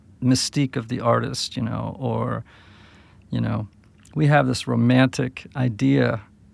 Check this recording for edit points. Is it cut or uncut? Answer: uncut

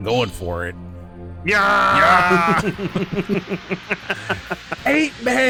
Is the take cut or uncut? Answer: uncut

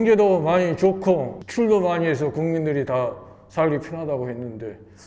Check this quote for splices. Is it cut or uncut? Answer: uncut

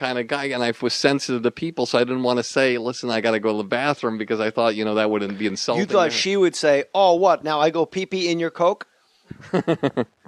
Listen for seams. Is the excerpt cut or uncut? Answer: uncut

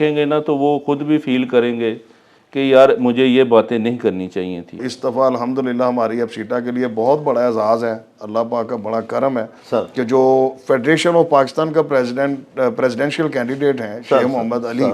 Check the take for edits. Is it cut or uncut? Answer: cut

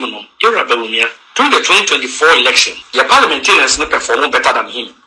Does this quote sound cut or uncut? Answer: cut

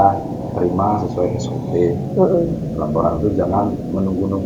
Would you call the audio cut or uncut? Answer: uncut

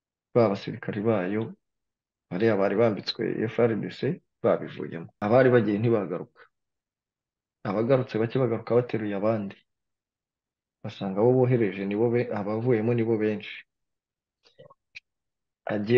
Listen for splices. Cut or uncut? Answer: cut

